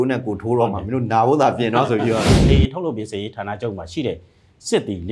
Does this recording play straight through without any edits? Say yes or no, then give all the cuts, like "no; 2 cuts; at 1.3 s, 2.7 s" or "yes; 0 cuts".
no; 1 cut; at 2.3 s